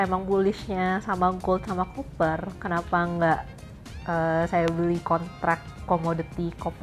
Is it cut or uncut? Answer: uncut